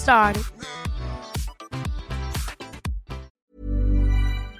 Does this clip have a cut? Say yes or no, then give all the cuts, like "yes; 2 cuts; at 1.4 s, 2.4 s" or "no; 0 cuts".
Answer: yes; 1 cut; at 3.3 s